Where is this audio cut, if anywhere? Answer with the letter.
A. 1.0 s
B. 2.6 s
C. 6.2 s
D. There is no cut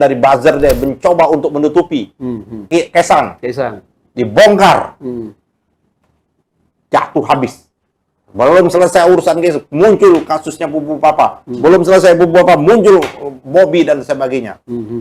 B